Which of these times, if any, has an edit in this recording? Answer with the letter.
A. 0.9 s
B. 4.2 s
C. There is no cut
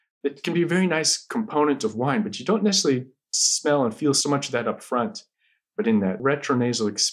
B